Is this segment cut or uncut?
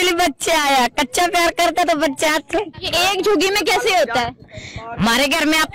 cut